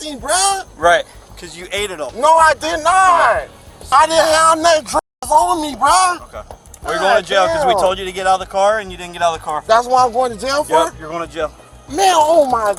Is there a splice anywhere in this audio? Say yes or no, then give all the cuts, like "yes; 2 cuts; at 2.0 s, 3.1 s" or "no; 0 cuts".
no; 0 cuts